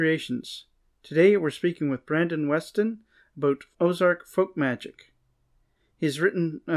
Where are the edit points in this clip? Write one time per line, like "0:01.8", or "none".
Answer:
none